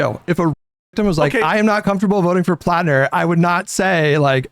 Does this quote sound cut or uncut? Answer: uncut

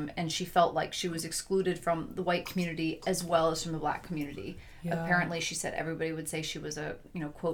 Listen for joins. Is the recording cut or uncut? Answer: uncut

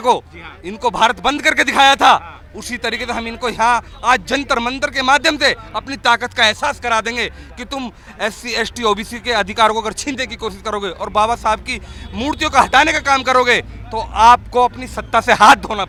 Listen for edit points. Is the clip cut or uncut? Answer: uncut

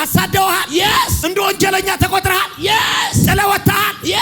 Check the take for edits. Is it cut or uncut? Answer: cut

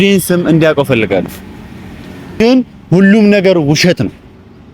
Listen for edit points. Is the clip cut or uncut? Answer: cut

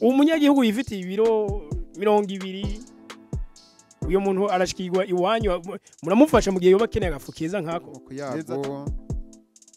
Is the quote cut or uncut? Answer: cut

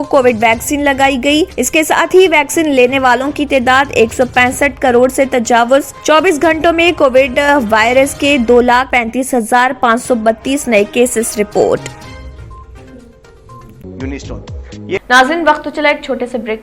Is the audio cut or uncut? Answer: cut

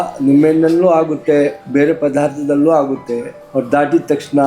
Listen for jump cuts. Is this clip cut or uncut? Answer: cut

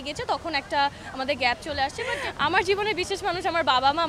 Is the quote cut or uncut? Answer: cut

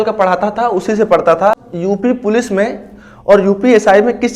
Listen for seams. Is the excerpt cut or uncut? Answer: cut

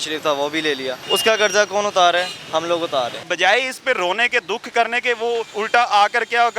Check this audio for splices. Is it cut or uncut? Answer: cut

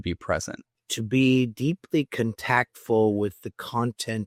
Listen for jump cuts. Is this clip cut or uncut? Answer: uncut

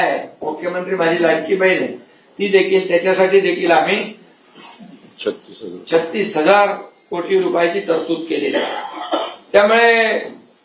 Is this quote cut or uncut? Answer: uncut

